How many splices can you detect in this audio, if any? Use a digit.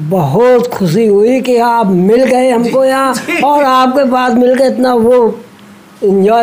0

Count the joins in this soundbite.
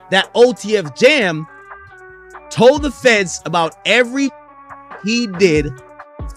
0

